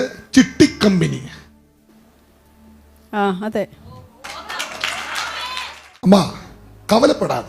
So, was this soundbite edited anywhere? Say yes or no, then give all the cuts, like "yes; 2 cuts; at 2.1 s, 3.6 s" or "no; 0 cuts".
yes; 1 cut; at 6.0 s